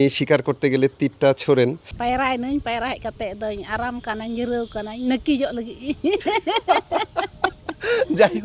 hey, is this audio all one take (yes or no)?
no